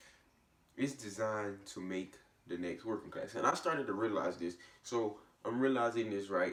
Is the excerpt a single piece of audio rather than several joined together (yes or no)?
yes